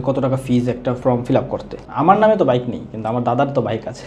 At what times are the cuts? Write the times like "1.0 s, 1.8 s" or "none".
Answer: 1.0 s, 1.7 s

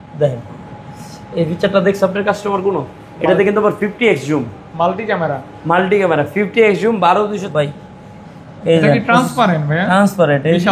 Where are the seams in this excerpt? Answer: 7.5 s

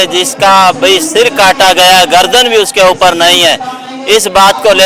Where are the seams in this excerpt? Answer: none

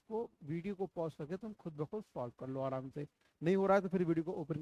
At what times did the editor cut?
none

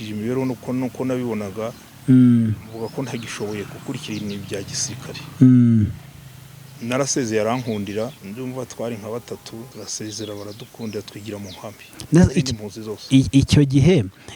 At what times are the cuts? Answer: 8.2 s, 9.7 s

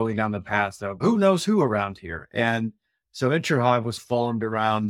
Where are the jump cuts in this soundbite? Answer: 1.0 s

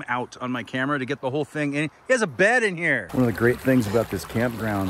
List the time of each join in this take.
3.0 s

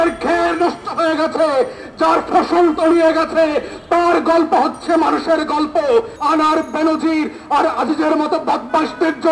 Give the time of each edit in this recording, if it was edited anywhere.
6.2 s

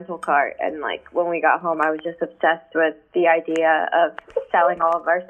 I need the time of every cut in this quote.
none

